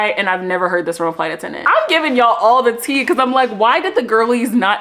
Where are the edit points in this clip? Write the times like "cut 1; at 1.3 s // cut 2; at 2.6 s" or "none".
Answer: cut 1; at 1.6 s